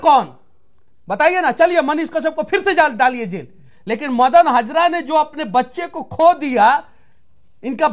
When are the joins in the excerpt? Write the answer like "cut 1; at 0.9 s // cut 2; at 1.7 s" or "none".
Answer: none